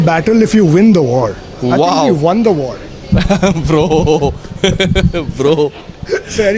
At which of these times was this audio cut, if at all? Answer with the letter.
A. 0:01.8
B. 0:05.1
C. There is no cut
C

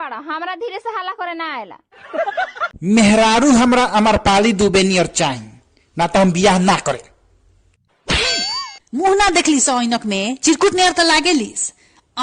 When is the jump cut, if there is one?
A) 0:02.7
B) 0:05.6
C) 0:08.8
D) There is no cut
A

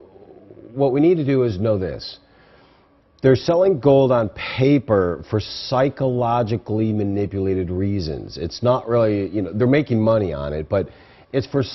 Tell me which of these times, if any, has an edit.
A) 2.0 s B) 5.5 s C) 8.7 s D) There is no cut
B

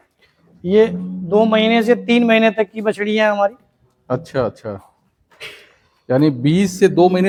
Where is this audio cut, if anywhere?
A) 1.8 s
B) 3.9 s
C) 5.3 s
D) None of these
D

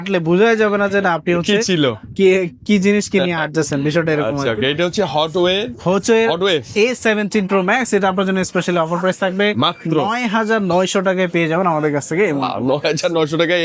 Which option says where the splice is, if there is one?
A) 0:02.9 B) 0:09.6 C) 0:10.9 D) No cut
D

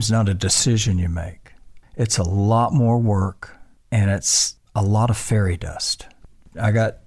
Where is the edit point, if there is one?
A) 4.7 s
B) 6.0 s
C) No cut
C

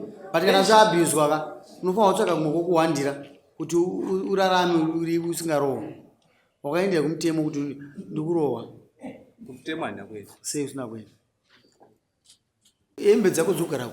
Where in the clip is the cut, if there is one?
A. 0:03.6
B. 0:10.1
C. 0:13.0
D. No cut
C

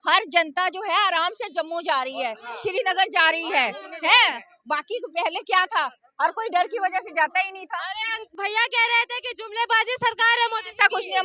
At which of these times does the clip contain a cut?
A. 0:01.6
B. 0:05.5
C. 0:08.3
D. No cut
D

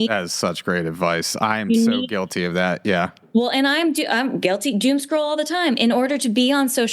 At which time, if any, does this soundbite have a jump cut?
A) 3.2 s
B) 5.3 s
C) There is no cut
A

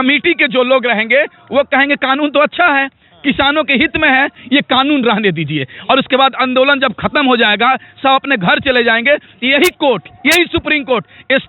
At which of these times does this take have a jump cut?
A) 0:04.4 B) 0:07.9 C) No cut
A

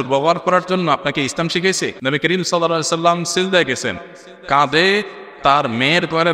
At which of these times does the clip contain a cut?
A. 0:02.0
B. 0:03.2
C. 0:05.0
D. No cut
A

